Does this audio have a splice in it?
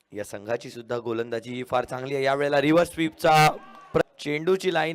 yes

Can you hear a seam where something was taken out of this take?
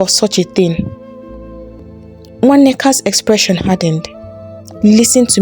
yes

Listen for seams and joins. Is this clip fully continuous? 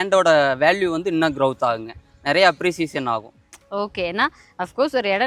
yes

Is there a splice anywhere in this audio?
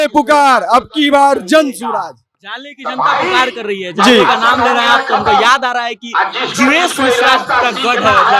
no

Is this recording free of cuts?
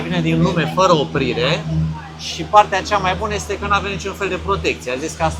yes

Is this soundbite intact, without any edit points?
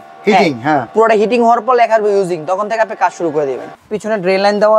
no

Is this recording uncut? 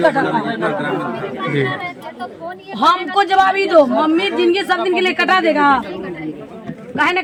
yes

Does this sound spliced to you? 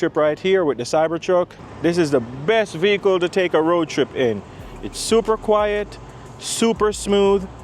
yes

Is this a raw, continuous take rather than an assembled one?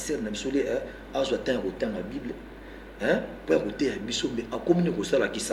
yes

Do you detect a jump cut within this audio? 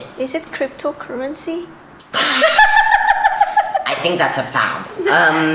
no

